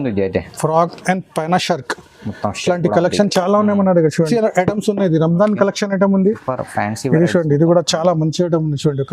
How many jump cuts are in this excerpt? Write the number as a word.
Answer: one